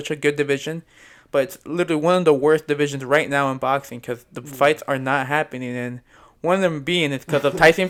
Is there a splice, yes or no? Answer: no